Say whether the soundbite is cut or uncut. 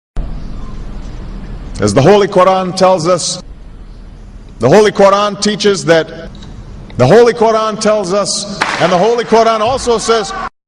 uncut